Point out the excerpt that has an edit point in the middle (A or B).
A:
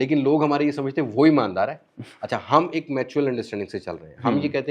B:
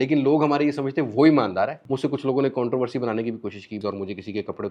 B